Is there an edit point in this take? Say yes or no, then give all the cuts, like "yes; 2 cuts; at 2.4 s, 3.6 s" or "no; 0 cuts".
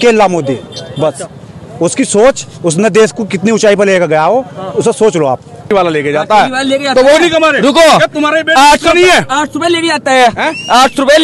yes; 1 cut; at 5.7 s